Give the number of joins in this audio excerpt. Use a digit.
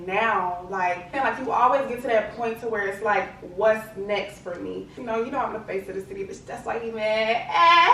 2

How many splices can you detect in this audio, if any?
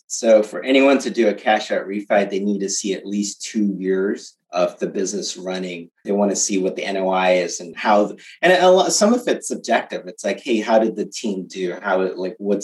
3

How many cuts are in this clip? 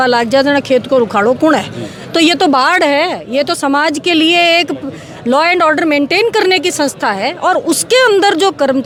0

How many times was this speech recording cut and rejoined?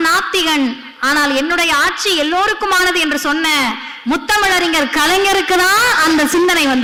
0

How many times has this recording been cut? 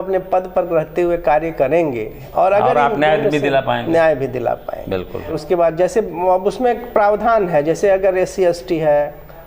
2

